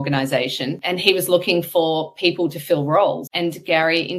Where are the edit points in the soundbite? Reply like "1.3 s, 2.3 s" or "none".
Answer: 0.8 s, 3.3 s